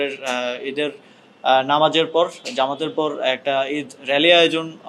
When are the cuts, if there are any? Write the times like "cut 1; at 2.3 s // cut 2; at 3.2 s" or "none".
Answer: none